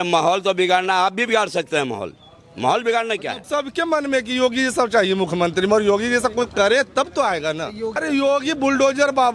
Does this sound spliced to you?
yes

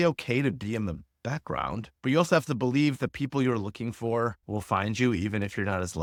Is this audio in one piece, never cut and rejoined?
yes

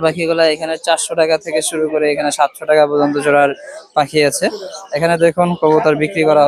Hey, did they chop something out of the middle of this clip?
no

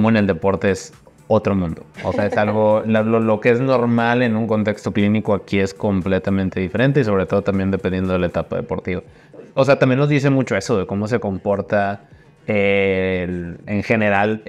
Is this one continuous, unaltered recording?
yes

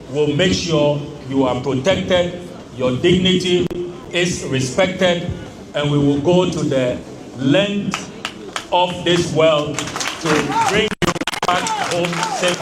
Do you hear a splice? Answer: no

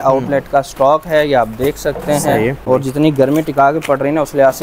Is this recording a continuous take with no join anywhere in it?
no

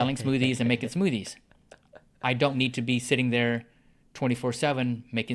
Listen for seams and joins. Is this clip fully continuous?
yes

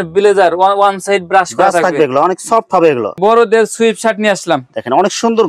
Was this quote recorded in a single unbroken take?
no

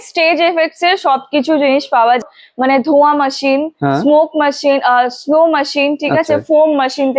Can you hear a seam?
yes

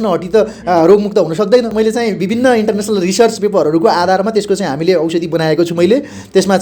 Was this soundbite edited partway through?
yes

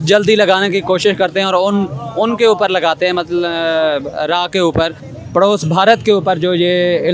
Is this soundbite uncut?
no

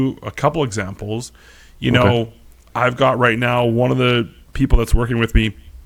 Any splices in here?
no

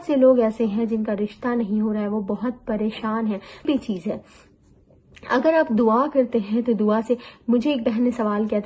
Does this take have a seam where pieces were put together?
yes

